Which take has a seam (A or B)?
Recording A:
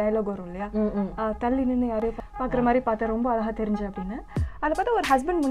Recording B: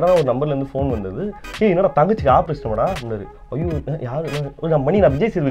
A